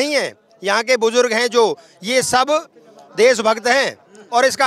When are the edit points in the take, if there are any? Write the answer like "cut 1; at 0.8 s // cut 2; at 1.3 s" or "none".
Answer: none